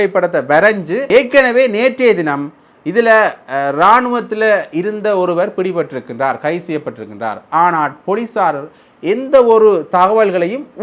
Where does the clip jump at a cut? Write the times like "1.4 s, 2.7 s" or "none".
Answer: 1.1 s